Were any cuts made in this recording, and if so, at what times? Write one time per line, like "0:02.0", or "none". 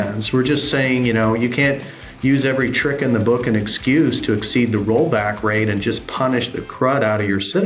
none